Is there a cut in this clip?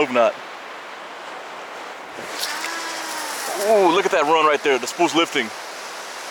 no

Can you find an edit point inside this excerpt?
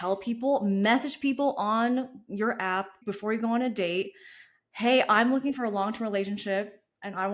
yes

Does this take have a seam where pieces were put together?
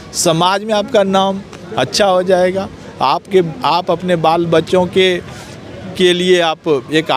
no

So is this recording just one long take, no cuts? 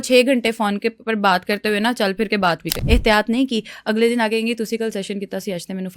no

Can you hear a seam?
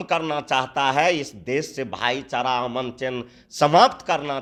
no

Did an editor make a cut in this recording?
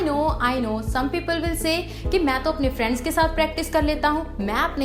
no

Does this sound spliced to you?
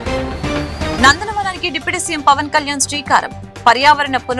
no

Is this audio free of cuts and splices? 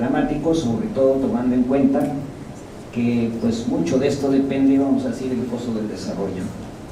yes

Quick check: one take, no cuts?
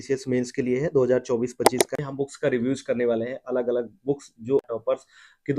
no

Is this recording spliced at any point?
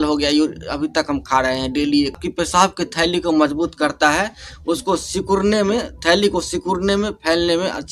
yes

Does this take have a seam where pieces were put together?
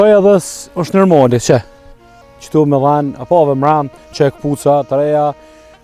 no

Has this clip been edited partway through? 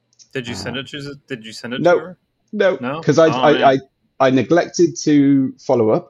no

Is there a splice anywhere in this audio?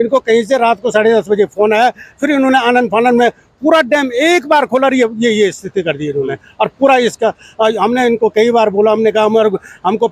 no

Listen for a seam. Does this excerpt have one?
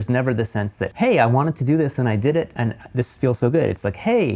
yes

